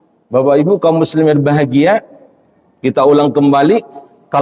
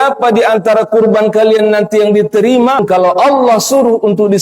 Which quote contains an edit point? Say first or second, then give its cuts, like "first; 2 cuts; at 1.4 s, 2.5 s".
second; 1 cut; at 2.8 s